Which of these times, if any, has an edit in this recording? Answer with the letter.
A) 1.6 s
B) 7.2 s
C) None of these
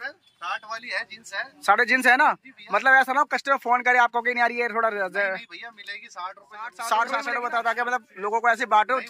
B